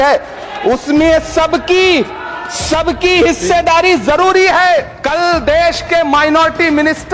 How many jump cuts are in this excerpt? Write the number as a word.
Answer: one